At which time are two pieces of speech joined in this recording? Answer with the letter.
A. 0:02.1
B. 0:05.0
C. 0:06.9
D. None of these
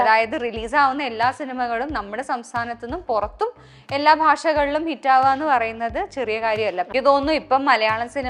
C